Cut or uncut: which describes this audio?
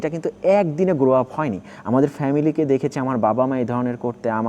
cut